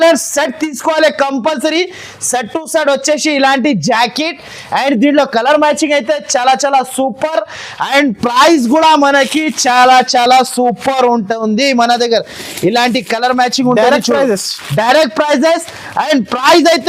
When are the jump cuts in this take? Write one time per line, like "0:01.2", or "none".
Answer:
none